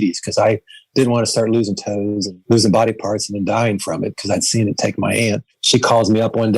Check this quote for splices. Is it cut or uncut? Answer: cut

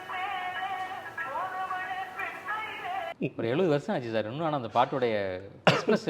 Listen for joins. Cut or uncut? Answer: cut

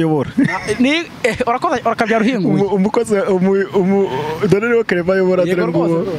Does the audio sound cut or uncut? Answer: uncut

